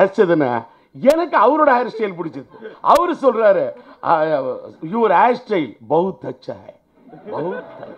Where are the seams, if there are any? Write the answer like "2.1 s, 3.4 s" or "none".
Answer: none